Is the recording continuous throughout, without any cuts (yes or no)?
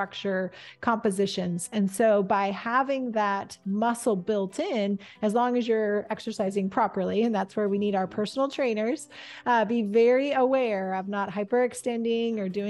yes